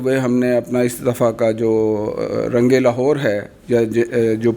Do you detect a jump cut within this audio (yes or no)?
no